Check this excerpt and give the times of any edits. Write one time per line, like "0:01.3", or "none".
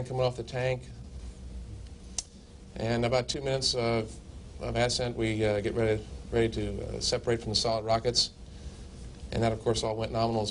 0:04.5